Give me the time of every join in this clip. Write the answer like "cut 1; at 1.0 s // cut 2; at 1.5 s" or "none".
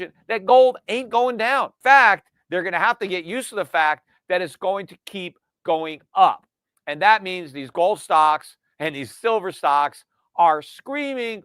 cut 1; at 1.7 s